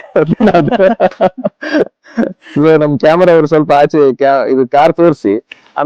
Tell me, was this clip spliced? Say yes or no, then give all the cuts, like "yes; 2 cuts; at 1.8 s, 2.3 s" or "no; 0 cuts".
no; 0 cuts